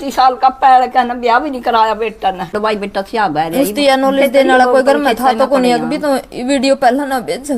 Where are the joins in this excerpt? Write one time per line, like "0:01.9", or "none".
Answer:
0:02.5

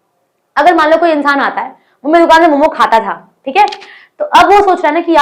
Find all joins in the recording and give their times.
none

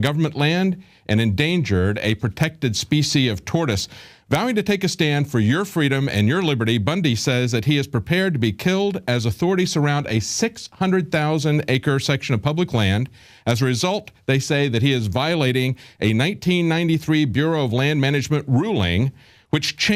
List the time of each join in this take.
0:17.5

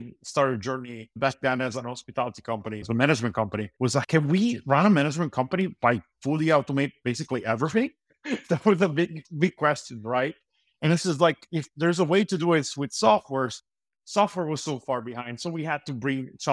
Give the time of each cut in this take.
0:01.1
0:02.8
0:04.1
0:08.1

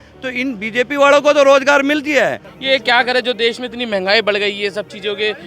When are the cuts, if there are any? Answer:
0:02.5

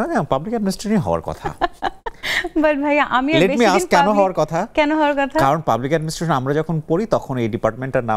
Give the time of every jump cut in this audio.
none

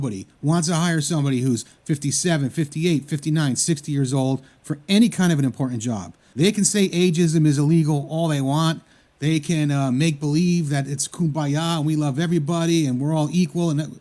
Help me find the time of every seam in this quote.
none

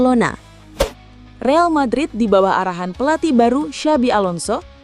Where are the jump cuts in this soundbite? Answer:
0:00.9

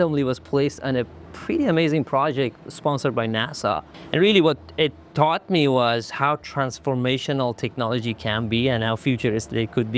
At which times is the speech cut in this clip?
0:03.9

